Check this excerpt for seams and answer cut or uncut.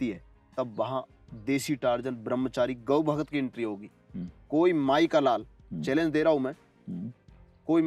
uncut